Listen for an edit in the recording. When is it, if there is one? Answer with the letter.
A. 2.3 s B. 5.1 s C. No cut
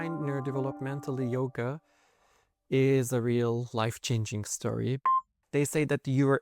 B